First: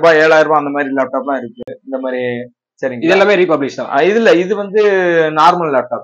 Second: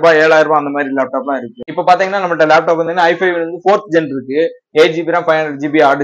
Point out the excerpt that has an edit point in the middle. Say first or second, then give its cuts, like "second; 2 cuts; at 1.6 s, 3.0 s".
second; 1 cut; at 1.7 s